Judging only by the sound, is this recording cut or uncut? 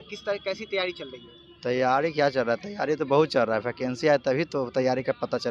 uncut